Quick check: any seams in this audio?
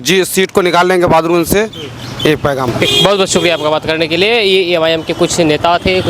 no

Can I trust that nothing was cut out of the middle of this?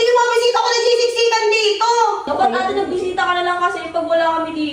no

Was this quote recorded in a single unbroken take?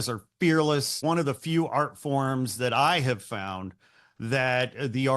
no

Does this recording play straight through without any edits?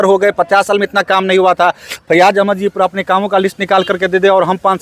yes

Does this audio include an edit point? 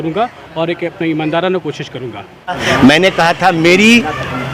yes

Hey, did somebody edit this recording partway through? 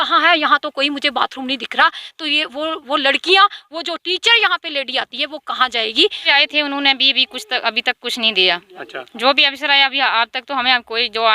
yes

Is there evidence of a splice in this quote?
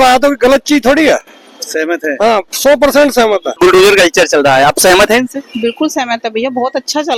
no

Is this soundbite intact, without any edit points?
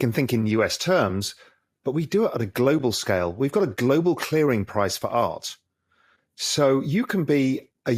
yes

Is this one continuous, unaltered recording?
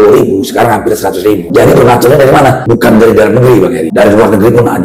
no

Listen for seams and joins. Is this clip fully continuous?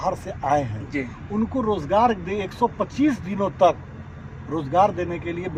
yes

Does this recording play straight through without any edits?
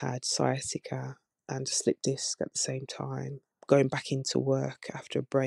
yes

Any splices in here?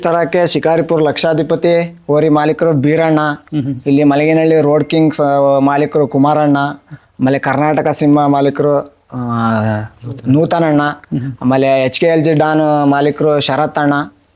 no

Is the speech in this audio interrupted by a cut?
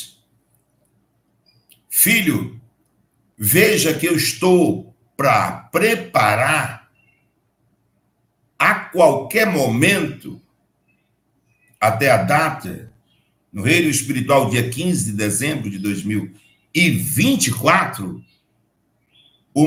no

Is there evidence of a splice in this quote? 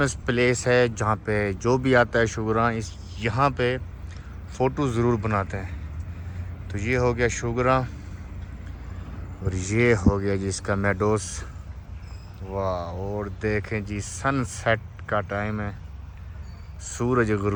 no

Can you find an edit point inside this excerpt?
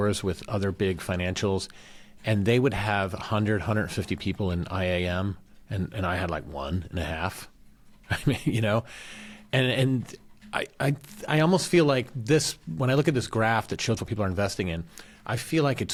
no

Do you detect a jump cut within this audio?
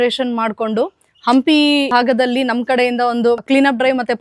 yes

